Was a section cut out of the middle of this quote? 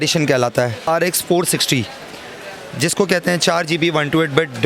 yes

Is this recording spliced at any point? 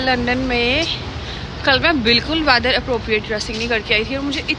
no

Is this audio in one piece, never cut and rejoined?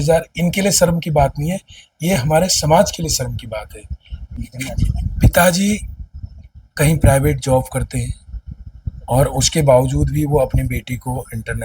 no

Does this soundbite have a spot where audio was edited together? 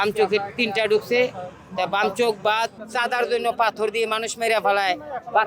yes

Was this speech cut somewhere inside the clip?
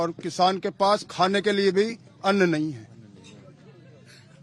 no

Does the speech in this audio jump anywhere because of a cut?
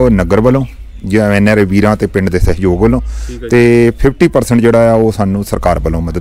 no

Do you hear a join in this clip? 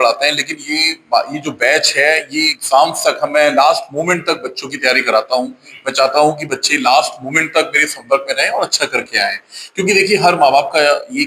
no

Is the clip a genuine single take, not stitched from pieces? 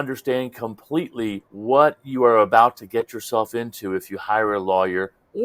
yes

